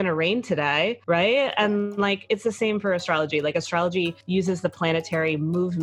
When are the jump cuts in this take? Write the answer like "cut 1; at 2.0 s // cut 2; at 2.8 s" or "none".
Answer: cut 1; at 4.2 s